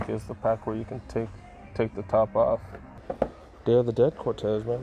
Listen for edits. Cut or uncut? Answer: cut